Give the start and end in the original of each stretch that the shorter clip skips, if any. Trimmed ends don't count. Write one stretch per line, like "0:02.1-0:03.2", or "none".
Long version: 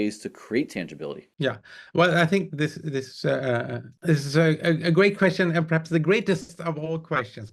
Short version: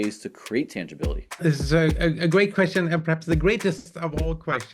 0:01.2-0:03.9